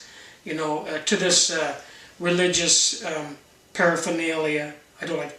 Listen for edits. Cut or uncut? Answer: cut